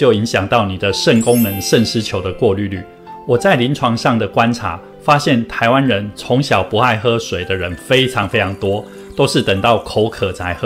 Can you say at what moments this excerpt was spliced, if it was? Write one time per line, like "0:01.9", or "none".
none